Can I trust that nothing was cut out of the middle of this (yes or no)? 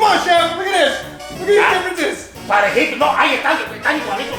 yes